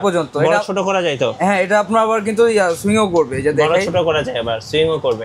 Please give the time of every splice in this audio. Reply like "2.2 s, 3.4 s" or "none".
none

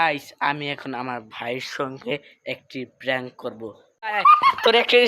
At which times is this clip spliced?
4.0 s

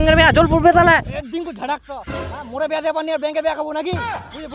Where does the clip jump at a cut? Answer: 1.1 s

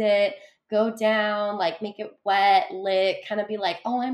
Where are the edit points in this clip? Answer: none

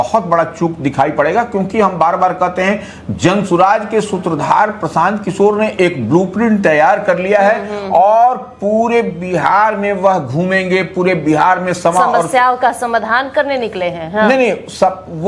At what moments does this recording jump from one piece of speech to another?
none

